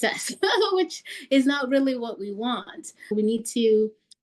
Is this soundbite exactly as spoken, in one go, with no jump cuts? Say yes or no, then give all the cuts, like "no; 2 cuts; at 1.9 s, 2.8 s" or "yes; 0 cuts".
no; 1 cut; at 3.1 s